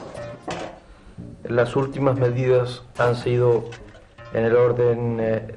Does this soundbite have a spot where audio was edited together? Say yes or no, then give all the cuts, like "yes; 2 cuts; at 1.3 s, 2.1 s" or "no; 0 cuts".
no; 0 cuts